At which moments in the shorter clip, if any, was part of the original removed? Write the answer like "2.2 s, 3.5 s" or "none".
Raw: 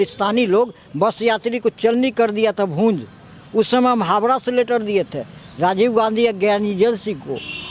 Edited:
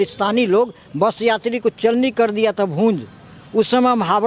none